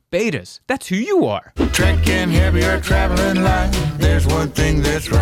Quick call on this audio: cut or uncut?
cut